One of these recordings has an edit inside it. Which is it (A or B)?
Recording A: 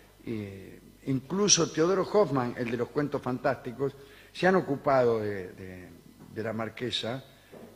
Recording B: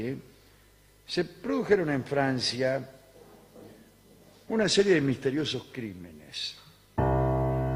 B